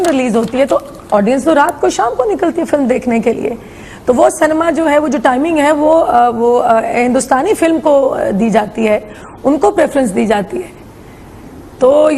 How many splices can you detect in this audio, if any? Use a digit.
1